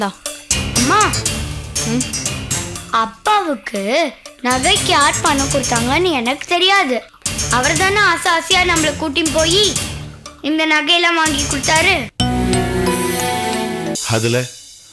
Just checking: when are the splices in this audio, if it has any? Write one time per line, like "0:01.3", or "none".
0:14.0